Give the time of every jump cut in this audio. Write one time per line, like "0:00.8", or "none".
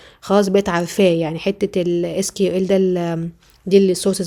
none